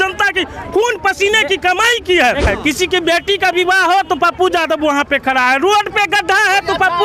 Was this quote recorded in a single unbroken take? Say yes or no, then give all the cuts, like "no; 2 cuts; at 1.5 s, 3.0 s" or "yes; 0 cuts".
no; 1 cut; at 2.5 s